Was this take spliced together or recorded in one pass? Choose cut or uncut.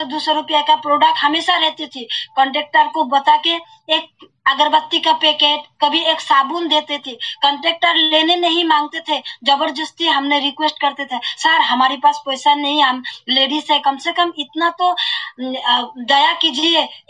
uncut